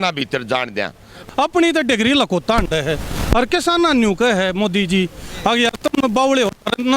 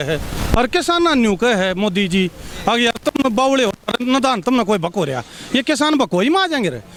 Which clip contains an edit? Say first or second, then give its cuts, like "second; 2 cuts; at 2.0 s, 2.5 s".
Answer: first; 1 cut; at 1.2 s